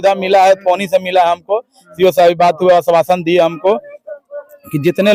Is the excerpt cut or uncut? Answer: uncut